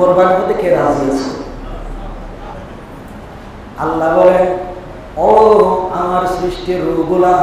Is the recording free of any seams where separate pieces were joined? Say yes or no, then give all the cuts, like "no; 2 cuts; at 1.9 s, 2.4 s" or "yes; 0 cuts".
no; 1 cut; at 2.5 s